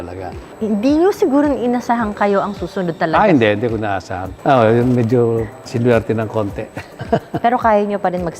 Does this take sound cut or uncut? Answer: cut